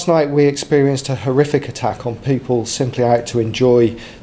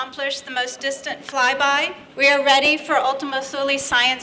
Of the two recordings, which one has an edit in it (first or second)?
second